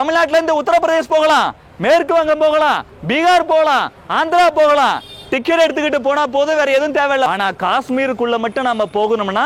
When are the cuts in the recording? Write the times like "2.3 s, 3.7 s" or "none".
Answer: 7.3 s

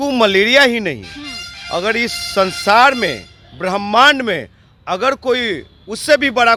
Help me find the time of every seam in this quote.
none

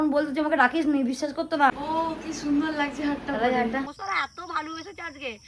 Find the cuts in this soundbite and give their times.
1.7 s, 4.0 s

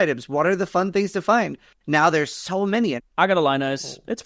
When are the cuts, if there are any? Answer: 3.0 s

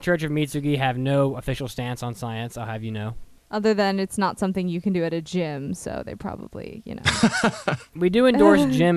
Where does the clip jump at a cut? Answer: 3.3 s

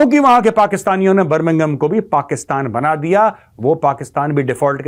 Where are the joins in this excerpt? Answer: none

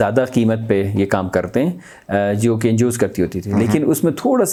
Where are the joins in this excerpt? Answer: none

